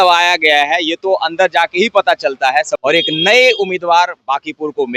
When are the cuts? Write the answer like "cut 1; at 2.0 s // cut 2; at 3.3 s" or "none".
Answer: cut 1; at 2.7 s